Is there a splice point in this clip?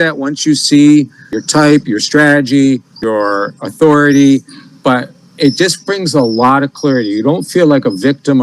yes; 2 cuts; at 1.4 s, 2.9 s

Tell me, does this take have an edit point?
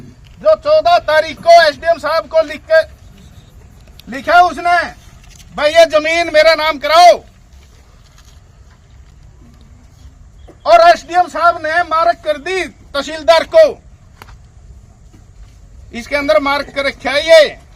no; 0 cuts

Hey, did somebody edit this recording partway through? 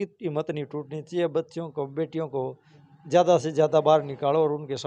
no; 0 cuts

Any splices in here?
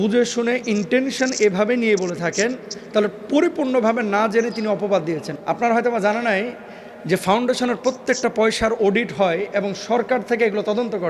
yes; 1 cut; at 5.3 s

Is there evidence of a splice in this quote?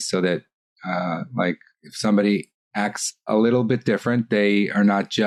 no; 0 cuts

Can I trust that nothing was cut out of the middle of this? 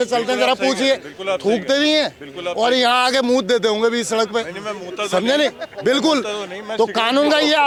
yes; 0 cuts

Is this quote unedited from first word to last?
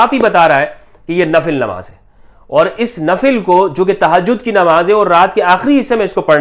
yes; 0 cuts

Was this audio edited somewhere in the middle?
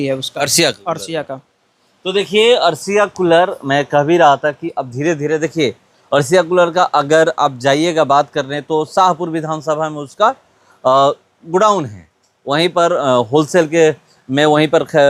no; 0 cuts

